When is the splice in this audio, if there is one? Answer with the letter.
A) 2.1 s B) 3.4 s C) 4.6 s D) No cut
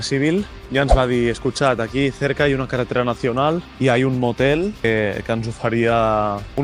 D